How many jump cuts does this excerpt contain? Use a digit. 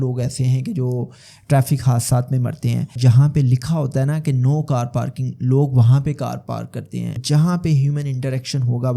2